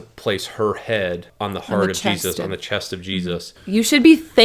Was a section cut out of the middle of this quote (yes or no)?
yes